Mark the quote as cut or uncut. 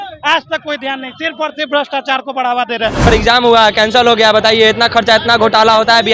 cut